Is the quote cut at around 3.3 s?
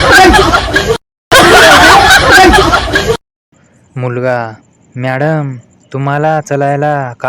yes; 2 cuts; at 1.3 s, 3.3 s

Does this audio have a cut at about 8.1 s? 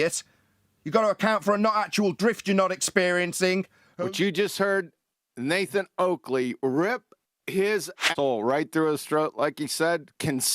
yes; 2 cuts; at 3.8 s, 8.1 s

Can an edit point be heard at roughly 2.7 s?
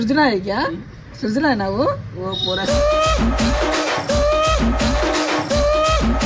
yes; 1 cut; at 2.7 s

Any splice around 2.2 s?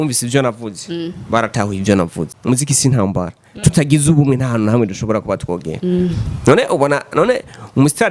yes; 1 cut; at 2.2 s

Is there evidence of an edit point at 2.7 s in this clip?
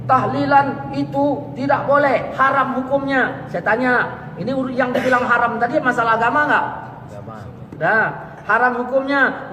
no; 0 cuts

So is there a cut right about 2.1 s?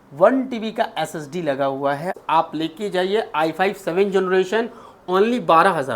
yes; 1 cut; at 2.1 s

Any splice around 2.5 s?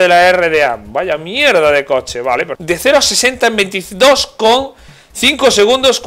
yes; 1 cut; at 2.5 s

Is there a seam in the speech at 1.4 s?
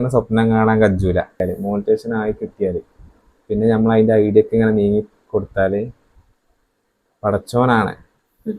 yes; 1 cut; at 1.4 s

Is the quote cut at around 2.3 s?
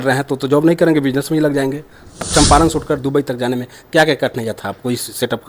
yes; 1 cut; at 2.3 s

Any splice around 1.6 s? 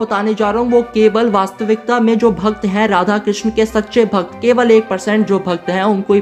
no; 0 cuts

